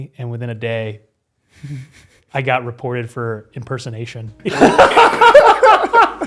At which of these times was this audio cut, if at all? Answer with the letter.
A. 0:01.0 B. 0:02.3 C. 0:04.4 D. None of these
C